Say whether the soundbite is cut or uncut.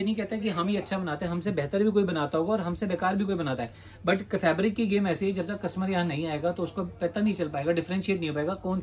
uncut